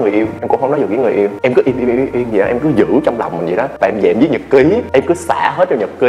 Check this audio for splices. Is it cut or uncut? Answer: uncut